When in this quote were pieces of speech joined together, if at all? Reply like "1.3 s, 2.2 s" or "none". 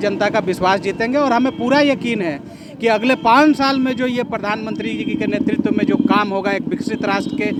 none